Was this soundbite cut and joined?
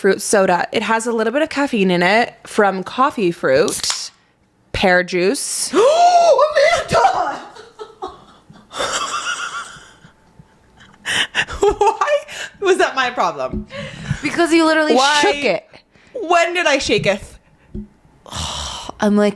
no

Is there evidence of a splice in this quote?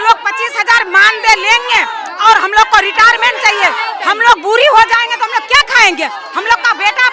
no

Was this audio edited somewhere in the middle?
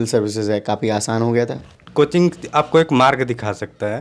yes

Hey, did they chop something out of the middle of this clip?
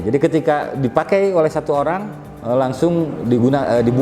no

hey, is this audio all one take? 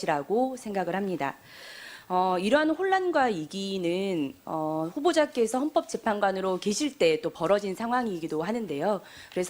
no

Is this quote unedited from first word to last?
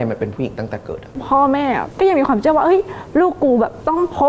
no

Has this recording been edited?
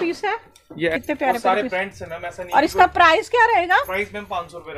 yes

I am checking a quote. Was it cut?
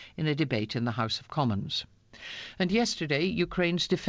no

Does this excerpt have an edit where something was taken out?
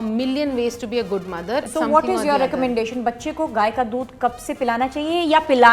yes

